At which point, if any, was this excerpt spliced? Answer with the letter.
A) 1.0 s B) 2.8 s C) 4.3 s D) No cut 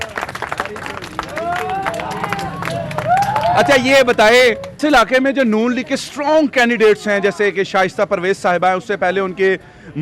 D